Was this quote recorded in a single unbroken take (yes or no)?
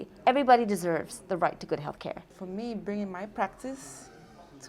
no